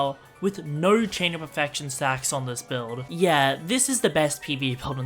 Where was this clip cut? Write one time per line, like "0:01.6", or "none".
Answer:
0:03.1